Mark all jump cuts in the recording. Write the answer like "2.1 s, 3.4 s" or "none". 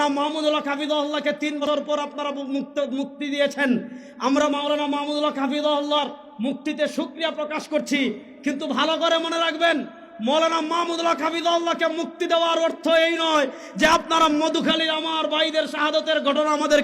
1.6 s